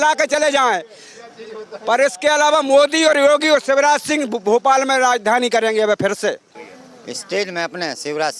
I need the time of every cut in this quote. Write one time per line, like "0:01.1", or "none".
0:06.5